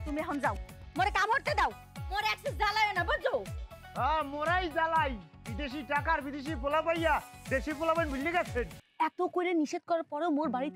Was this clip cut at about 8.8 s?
yes; 1 cut; at 8.8 s

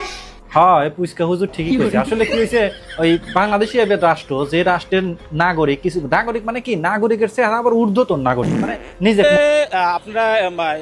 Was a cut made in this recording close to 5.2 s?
no; 1 cut; at 9.2 s

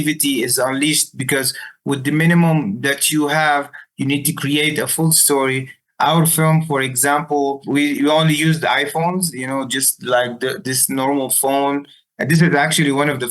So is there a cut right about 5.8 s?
yes; 2 cuts; at 5.8 s, 7.6 s

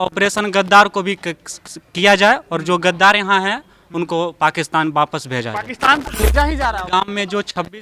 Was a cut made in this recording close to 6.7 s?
yes; 1 cut; at 6.7 s

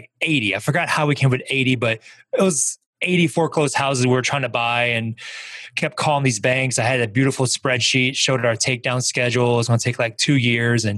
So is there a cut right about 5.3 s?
no; 0 cuts

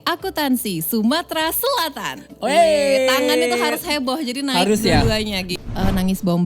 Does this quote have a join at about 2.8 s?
no; 1 cut; at 5.5 s

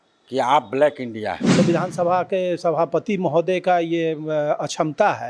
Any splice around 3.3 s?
no; 1 cut; at 1.6 s

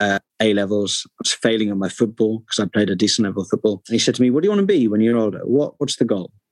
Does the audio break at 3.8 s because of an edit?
yes; 1 cut; at 3.8 s

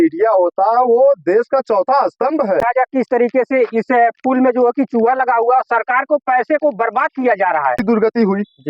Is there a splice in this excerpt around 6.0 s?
no; 2 cuts; at 2.6 s, 7.8 s

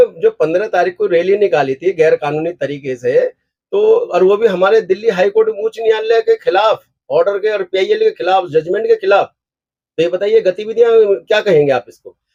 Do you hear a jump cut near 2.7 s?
no; 0 cuts

